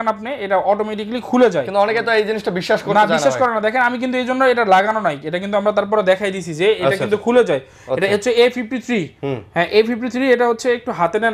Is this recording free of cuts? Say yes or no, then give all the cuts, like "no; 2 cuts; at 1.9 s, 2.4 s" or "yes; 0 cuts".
yes; 0 cuts